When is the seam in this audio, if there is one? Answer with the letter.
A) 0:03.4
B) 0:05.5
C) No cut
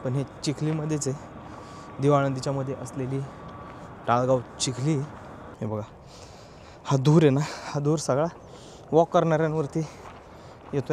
B